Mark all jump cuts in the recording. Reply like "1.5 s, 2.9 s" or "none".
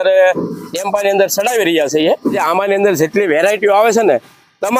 2.4 s